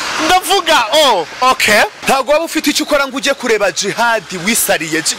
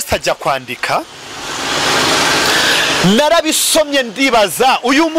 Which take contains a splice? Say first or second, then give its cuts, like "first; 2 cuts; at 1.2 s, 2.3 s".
first; 1 cut; at 2.0 s